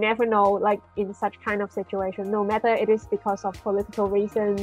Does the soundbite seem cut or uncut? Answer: uncut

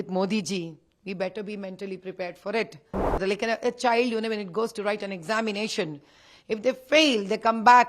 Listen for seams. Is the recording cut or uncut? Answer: cut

